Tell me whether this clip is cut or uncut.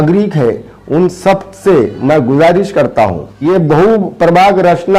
cut